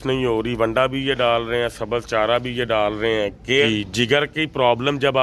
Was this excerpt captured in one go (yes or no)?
no